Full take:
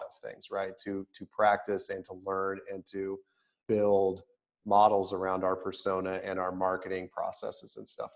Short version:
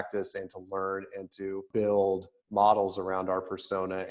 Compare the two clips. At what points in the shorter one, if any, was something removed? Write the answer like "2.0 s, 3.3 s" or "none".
1.7 s, 2.3 s